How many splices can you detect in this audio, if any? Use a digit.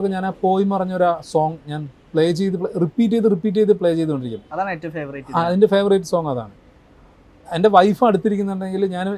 0